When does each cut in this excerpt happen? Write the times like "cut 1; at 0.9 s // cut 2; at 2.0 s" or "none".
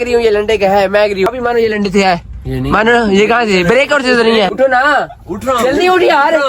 cut 1; at 1.3 s // cut 2; at 4.5 s